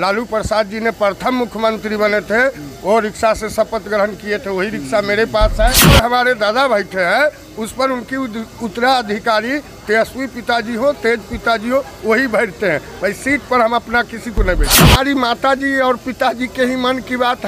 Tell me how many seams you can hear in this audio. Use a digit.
2